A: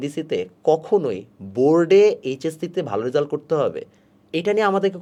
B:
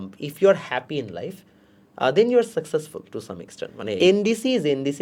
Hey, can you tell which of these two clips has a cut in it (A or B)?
B